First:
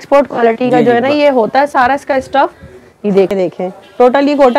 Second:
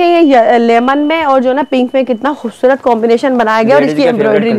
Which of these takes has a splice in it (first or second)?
first